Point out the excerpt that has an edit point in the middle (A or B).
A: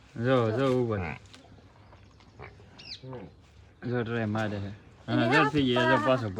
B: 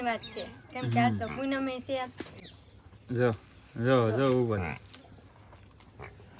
B